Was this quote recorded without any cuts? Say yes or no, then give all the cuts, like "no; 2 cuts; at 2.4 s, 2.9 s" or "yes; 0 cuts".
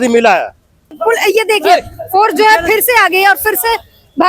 no; 1 cut; at 1.0 s